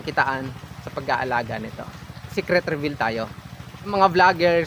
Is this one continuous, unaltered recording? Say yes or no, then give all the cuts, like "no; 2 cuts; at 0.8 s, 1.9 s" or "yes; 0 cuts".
no; 2 cuts; at 2.1 s, 3.9 s